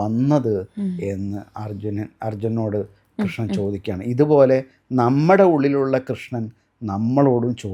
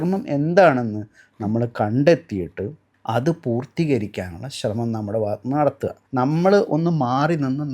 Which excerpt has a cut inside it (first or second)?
second